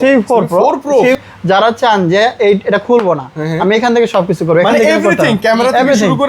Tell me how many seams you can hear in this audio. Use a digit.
1